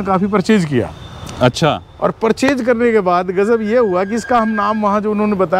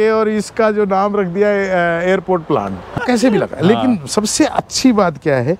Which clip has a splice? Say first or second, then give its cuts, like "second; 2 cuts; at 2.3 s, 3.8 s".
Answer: second; 1 cut; at 2.9 s